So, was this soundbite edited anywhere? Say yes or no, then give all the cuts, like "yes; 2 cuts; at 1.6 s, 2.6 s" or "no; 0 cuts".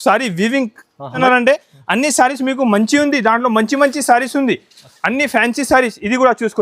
yes; 1 cut; at 1.2 s